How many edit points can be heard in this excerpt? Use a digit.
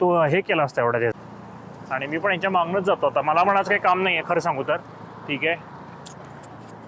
1